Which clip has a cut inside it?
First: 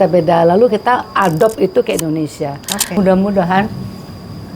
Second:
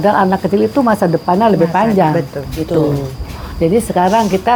first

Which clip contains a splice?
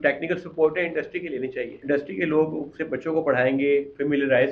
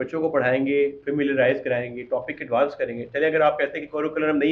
first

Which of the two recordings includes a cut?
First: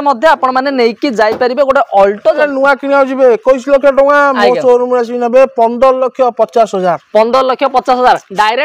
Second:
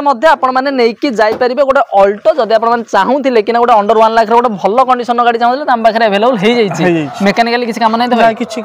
first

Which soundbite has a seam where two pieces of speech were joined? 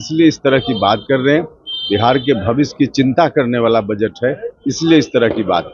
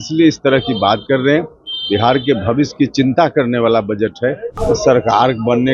second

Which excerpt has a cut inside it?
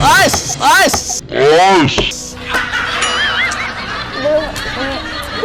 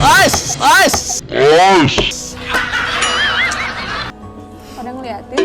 second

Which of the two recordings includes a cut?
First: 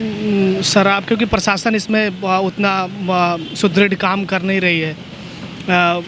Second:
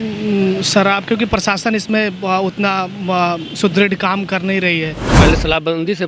second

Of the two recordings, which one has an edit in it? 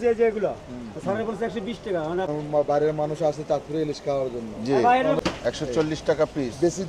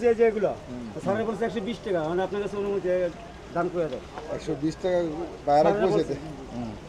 first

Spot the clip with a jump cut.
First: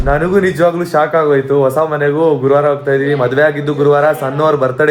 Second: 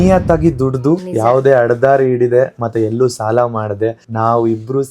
second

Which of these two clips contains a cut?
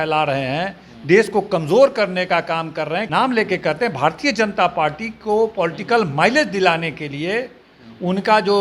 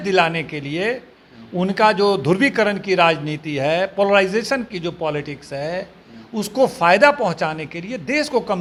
first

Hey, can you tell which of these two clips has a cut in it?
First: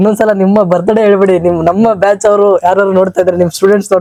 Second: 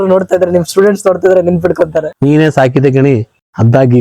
second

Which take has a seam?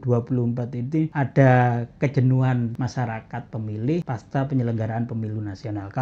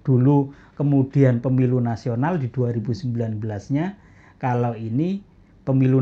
first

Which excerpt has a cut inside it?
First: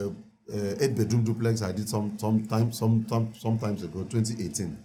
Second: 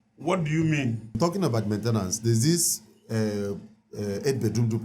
second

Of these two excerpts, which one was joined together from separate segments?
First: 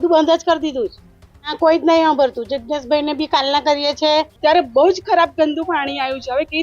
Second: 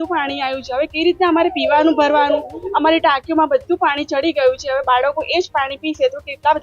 first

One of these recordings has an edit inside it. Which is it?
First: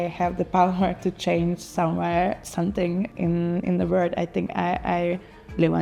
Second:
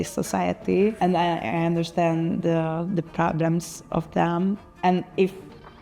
second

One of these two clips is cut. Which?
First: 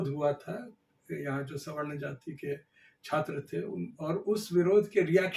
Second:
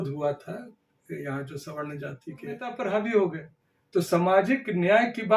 second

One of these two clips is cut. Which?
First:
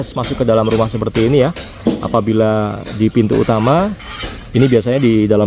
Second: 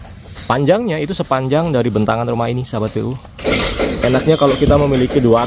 second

